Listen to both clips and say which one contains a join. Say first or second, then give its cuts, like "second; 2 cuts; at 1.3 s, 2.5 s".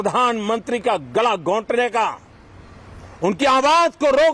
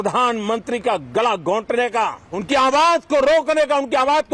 second; 1 cut; at 2.3 s